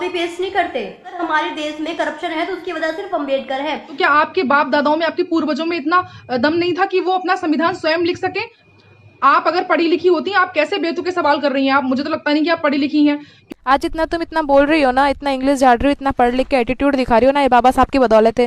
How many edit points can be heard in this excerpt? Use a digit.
4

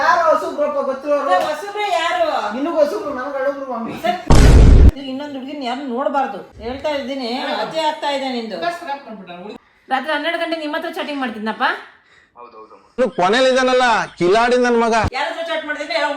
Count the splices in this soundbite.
3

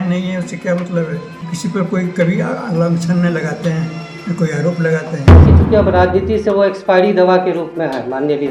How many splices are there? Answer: 2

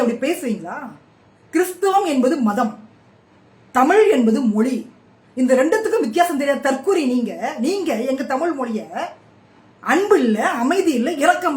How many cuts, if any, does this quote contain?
0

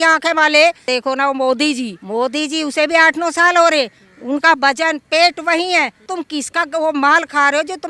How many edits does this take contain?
1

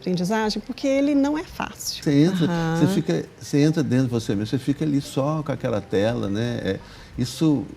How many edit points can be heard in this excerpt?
1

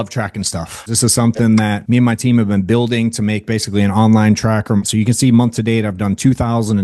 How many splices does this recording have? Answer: 3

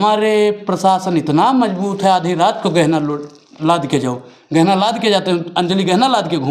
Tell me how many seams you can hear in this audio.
0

